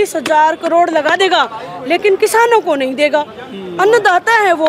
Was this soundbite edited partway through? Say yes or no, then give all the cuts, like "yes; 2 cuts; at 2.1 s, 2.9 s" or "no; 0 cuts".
no; 0 cuts